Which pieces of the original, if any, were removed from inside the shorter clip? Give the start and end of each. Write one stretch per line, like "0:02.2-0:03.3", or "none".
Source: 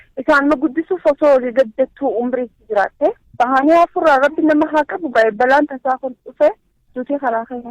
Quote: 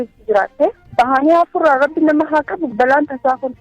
0:05.1-0:05.3